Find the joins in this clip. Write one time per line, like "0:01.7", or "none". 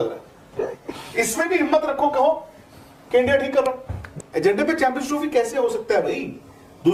none